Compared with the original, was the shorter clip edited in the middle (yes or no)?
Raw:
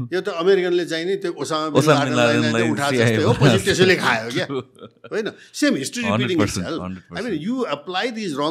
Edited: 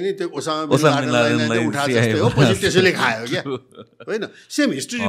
no